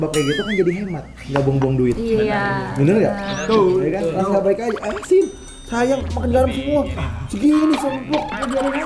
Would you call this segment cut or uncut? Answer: uncut